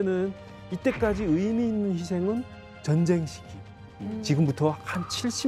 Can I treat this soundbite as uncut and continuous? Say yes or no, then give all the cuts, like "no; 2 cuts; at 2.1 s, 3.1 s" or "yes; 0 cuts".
yes; 0 cuts